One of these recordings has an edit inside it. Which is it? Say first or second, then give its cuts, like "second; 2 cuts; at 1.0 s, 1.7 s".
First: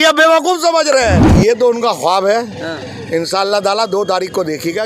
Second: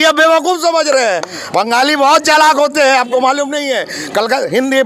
first; 1 cut; at 1.3 s